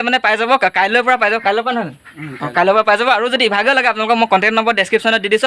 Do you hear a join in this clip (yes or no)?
no